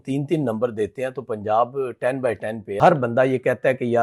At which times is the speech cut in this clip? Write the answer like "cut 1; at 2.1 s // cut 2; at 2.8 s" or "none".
cut 1; at 2.8 s